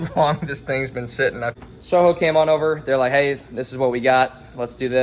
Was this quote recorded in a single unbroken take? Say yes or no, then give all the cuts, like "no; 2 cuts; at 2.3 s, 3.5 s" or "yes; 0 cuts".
no; 1 cut; at 1.6 s